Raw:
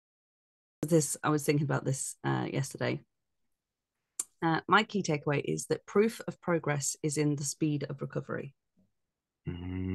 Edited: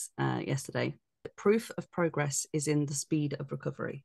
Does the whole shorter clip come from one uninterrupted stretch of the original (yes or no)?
no